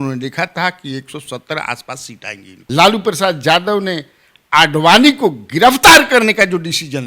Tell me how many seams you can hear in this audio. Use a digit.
1